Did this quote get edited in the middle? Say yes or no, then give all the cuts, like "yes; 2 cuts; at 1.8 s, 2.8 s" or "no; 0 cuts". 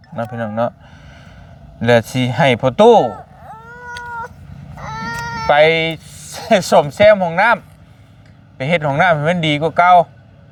no; 0 cuts